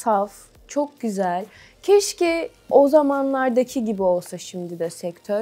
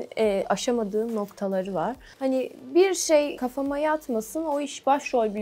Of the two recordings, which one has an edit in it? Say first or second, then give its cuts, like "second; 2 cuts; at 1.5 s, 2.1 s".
second; 2 cuts; at 2.1 s, 3.4 s